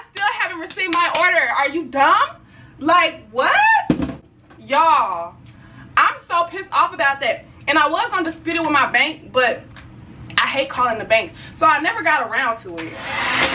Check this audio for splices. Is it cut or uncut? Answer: uncut